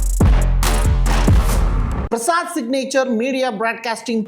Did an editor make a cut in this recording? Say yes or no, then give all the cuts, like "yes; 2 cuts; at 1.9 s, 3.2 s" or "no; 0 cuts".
yes; 1 cut; at 2.0 s